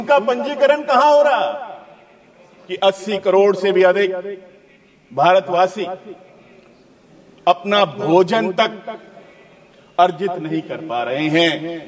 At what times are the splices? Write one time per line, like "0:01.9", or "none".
0:02.8

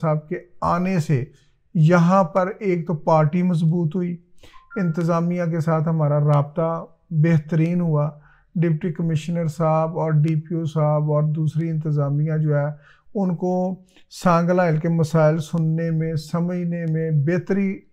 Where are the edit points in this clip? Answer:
none

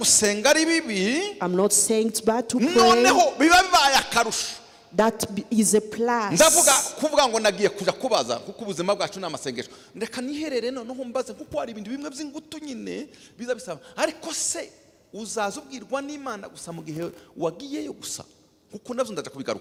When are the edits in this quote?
none

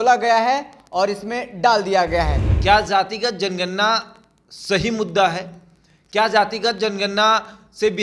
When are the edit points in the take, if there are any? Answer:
0:02.4

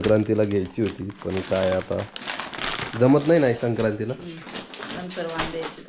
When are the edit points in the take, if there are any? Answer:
none

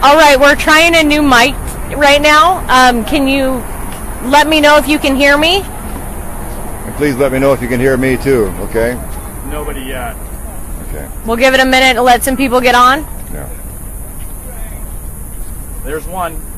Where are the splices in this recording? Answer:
none

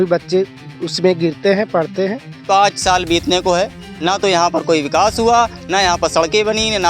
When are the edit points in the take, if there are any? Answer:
0:02.4

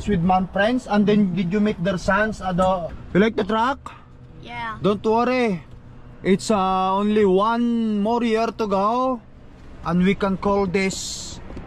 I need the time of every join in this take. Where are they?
0:02.9

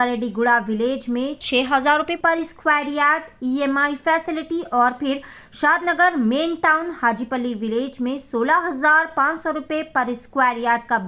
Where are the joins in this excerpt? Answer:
none

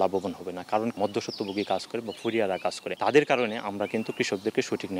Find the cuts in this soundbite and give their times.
0:00.9
0:02.9

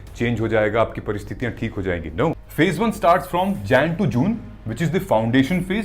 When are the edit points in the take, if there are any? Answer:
0:02.4

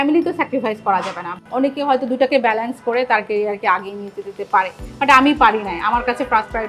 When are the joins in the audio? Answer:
0:01.2

